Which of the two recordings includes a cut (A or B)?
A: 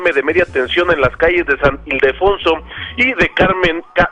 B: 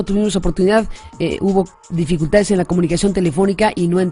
A